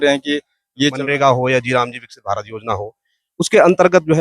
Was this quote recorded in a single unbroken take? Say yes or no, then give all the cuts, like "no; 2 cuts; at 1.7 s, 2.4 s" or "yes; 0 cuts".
no; 1 cut; at 1.0 s